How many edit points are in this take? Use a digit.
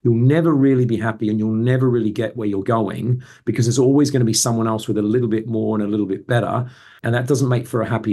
1